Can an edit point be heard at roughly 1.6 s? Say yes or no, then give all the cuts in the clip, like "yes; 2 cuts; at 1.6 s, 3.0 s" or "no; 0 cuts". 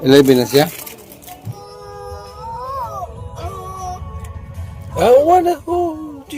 yes; 1 cut; at 1.6 s